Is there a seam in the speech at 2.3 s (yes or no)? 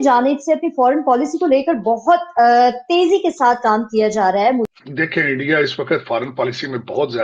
no